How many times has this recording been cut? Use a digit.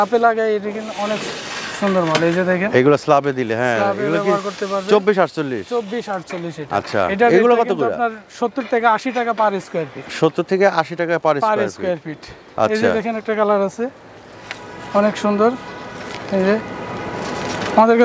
0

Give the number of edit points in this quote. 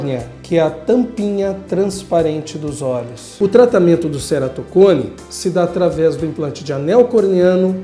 0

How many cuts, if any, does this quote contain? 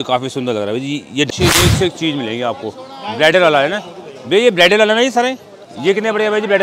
1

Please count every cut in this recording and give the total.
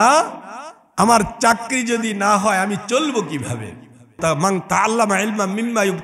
1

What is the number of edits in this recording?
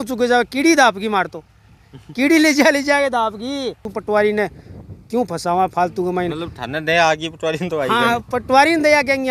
1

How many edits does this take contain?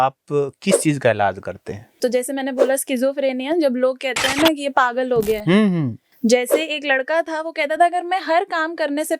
2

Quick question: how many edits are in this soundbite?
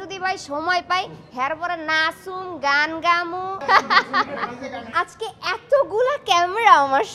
2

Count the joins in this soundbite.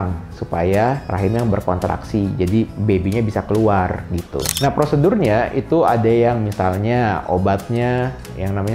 1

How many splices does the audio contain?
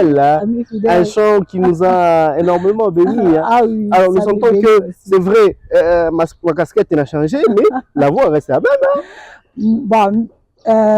0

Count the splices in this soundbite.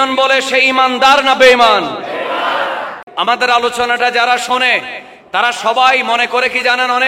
1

